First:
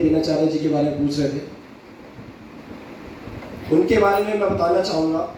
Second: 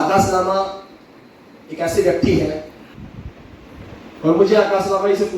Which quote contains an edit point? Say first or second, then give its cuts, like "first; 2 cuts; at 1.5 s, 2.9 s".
second; 1 cut; at 2.9 s